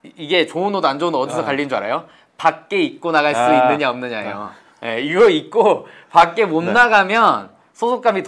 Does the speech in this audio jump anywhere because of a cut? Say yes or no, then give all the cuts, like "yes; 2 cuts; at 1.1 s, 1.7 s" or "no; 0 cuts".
no; 0 cuts